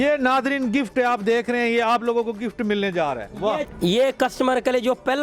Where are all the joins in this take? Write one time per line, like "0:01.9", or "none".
none